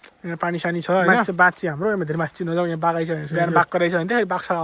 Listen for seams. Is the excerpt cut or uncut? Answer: cut